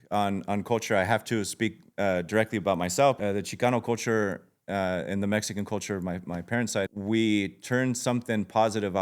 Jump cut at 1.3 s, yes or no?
no